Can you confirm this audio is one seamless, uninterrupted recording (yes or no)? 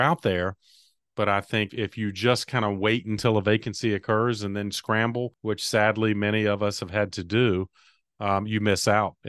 no